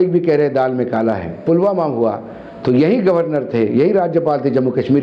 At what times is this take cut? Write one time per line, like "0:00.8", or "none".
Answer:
0:01.4